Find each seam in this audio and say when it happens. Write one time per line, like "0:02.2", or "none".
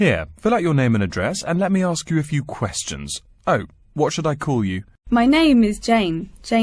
0:04.9